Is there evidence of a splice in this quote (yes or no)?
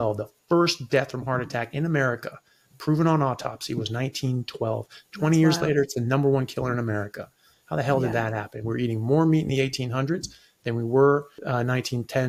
no